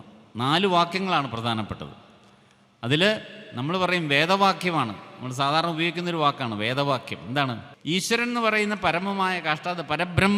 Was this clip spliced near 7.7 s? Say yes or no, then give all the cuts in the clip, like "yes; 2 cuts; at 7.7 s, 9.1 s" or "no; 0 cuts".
yes; 1 cut; at 7.7 s